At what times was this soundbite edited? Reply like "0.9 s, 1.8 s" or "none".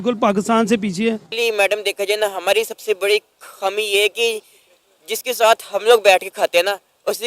1.3 s